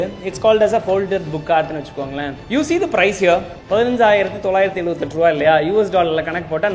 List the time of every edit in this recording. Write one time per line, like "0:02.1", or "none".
0:02.3
0:03.5